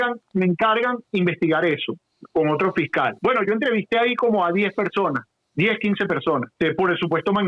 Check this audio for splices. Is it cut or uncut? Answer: cut